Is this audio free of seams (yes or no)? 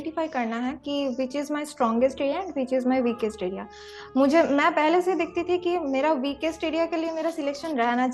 yes